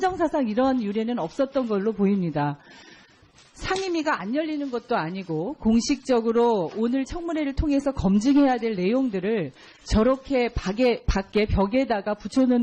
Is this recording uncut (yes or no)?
yes